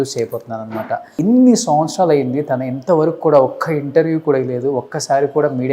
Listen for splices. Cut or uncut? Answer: cut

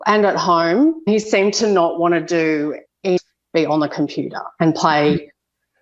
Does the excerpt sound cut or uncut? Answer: cut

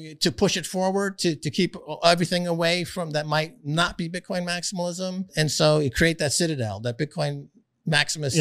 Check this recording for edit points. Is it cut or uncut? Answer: cut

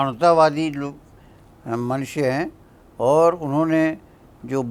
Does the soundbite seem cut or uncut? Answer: uncut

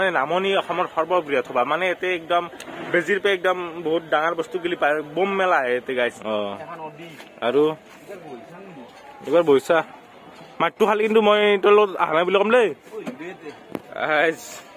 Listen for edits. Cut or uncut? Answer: cut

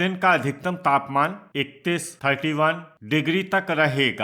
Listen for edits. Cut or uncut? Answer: cut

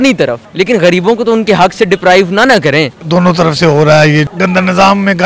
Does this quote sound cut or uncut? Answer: uncut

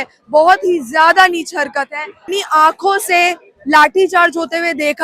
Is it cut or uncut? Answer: cut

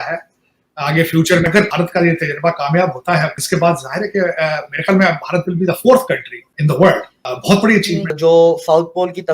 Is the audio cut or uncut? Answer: cut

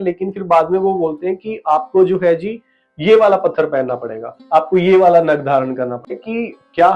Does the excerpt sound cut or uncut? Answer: cut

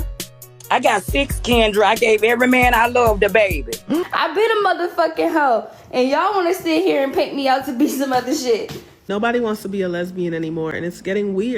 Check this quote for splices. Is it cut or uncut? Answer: cut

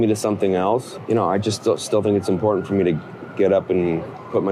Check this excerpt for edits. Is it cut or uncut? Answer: cut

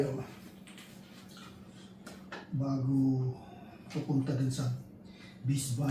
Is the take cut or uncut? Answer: uncut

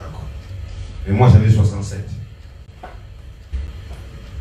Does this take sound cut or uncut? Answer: cut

